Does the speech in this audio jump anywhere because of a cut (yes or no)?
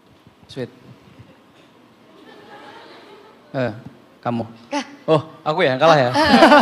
no